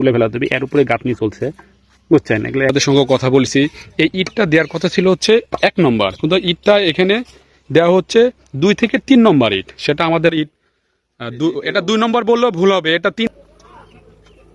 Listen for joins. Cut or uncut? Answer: cut